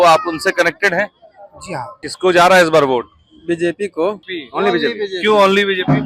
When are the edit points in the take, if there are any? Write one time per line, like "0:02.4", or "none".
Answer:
0:02.0
0:04.4